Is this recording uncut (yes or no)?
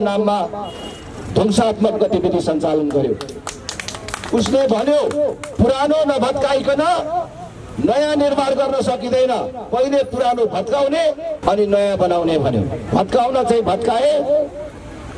no